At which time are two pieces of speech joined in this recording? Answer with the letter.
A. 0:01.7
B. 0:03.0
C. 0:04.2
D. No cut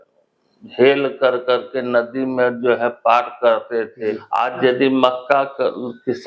C